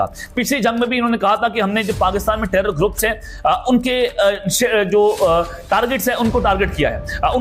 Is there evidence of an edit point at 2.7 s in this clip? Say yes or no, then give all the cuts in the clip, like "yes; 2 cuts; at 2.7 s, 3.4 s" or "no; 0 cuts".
no; 0 cuts